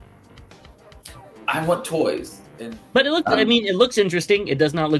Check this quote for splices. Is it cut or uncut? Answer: cut